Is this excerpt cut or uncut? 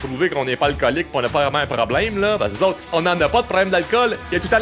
cut